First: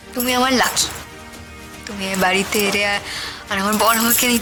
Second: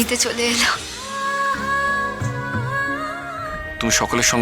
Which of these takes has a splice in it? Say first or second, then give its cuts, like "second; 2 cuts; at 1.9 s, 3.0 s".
second; 2 cuts; at 1.0 s, 3.5 s